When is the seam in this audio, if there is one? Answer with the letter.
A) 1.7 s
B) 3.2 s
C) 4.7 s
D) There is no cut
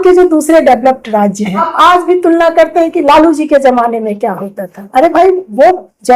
A